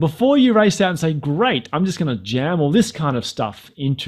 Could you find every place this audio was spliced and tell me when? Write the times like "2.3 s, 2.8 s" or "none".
none

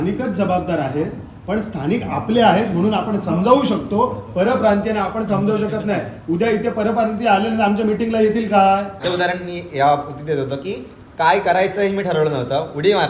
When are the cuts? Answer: 9.0 s

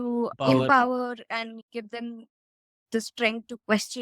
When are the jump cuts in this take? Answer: 1.6 s

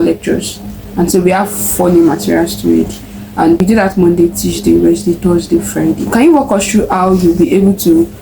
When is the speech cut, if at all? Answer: 6.0 s

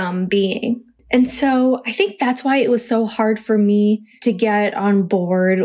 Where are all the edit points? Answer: 0.9 s, 4.1 s

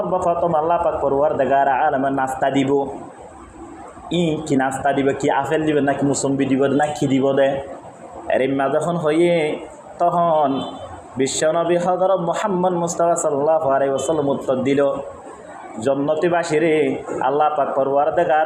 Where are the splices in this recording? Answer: none

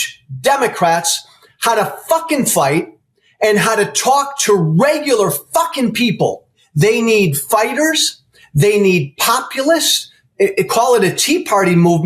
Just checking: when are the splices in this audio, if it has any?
6.6 s

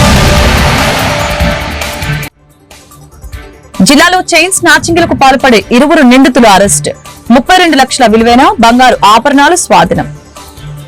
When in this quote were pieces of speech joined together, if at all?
none

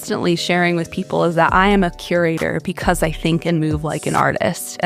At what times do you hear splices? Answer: none

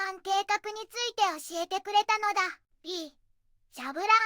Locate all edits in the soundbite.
2.6 s

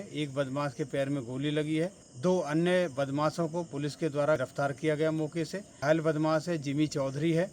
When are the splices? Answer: 2.0 s, 4.4 s, 5.8 s

